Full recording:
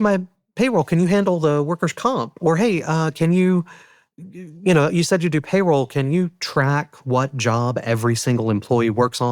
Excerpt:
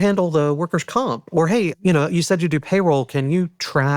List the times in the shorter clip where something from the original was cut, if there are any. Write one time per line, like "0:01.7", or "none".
0:01.8